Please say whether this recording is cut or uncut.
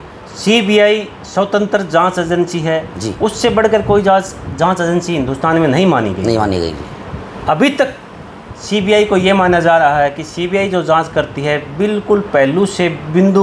uncut